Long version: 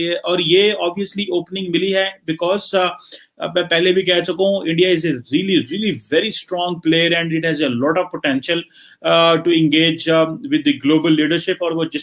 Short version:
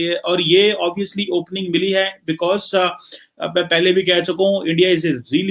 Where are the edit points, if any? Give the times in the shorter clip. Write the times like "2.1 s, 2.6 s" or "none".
none

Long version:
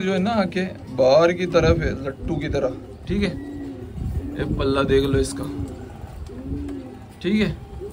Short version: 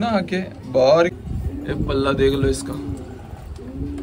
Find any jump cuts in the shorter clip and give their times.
1.2 s

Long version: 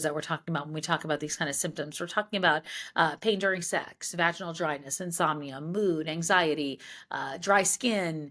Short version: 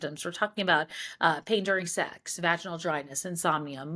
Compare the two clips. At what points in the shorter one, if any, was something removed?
none

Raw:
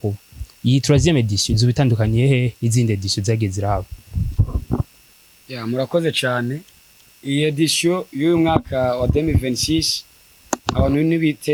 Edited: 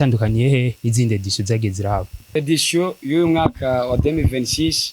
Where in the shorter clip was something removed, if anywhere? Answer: 2.3 s

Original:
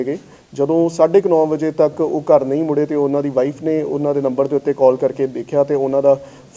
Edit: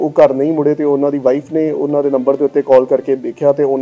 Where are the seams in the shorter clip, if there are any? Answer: none

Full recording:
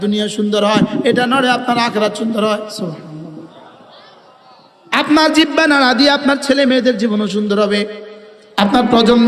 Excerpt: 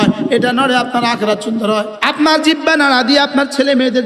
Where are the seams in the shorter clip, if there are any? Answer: 1.9 s

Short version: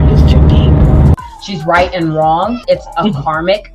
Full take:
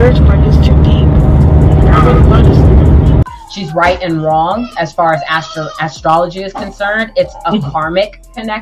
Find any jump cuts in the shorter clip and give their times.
1.2 s, 2.6 s

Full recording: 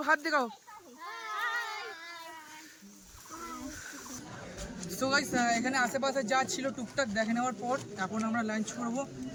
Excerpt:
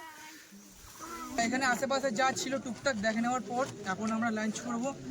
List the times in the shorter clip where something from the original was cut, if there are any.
1.4 s

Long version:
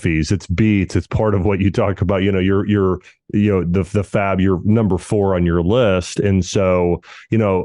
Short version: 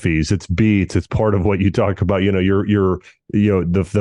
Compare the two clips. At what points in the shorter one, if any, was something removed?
none

